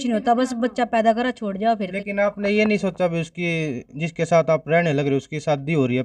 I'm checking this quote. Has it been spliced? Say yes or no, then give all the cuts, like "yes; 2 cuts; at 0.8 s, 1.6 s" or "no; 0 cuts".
yes; 1 cut; at 1.9 s